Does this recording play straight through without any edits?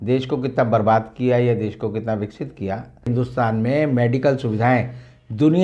no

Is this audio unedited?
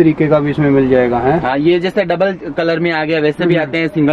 yes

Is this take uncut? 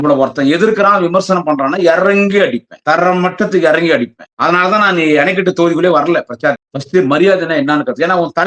no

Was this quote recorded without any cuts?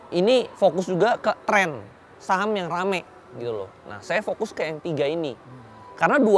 yes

